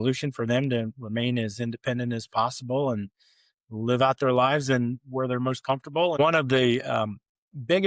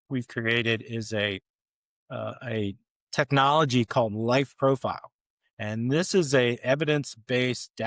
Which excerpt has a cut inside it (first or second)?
first